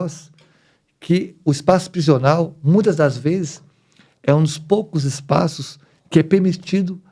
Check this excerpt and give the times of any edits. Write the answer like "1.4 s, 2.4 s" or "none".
none